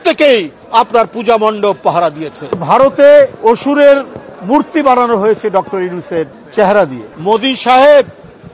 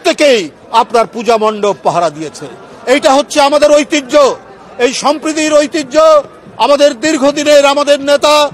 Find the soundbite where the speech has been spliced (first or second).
first